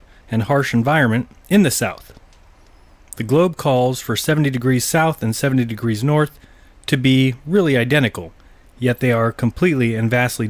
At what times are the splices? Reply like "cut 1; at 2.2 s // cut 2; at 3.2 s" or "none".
none